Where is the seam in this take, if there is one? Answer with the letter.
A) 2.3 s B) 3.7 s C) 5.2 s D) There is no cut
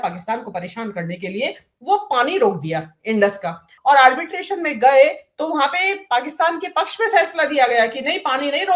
B